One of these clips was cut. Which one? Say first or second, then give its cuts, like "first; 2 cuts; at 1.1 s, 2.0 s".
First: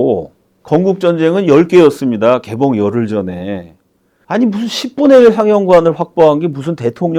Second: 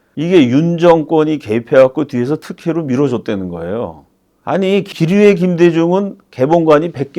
second; 1 cut; at 4.9 s